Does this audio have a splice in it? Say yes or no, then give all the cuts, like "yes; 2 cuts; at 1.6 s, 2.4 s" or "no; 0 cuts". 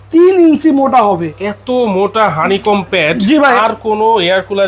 no; 0 cuts